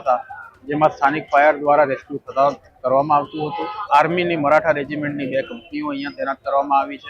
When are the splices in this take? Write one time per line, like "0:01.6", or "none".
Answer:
0:03.8